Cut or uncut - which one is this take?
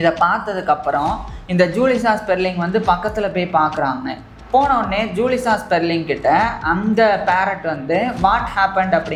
uncut